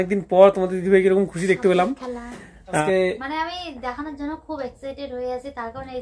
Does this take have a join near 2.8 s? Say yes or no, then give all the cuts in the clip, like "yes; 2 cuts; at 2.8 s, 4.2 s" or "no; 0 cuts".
yes; 1 cut; at 2.8 s